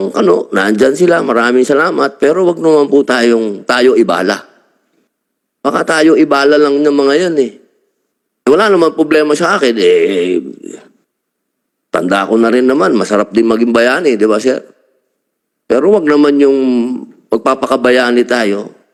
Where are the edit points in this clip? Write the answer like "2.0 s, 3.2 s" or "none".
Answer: none